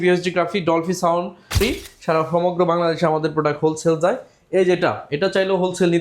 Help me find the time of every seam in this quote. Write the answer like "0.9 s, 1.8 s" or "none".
1.6 s